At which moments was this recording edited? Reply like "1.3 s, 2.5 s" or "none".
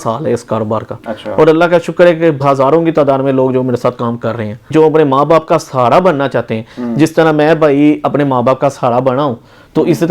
2.4 s, 4.7 s